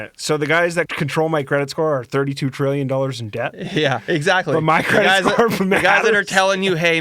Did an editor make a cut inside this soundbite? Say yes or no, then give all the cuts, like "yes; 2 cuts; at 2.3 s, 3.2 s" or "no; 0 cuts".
yes; 1 cut; at 0.9 s